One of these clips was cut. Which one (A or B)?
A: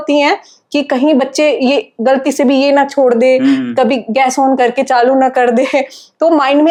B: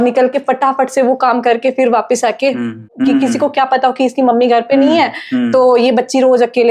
B